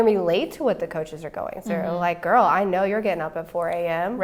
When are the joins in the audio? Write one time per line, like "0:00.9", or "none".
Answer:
none